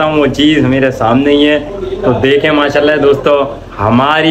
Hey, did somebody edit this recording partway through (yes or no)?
no